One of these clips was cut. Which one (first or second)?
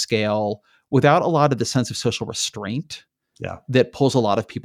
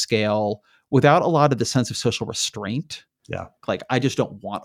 second